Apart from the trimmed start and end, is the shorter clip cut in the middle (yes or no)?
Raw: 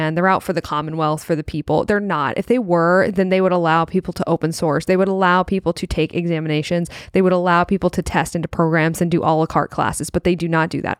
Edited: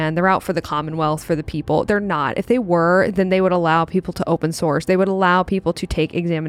no